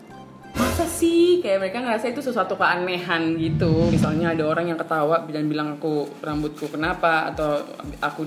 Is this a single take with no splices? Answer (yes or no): no